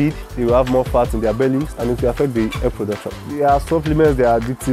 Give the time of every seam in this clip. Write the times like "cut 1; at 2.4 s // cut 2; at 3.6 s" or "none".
cut 1; at 1.7 s // cut 2; at 3.2 s

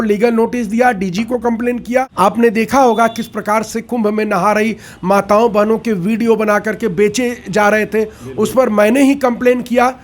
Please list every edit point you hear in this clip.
cut 1; at 2.1 s

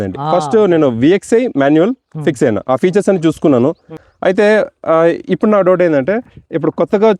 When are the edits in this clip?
cut 1; at 3.9 s

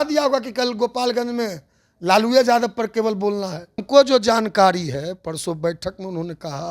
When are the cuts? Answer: cut 1; at 3.8 s

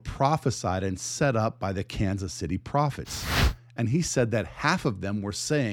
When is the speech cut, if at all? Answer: none

